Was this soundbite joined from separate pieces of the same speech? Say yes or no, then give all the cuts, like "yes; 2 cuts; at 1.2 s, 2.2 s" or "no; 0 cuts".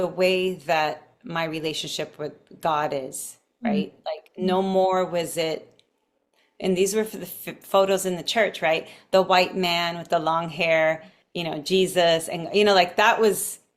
no; 0 cuts